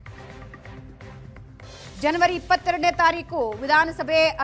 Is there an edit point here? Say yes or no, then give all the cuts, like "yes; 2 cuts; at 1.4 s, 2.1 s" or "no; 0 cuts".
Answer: yes; 1 cut; at 1.1 s